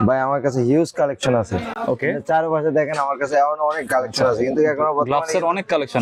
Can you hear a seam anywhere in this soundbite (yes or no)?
no